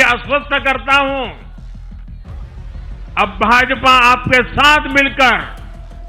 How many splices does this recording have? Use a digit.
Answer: 2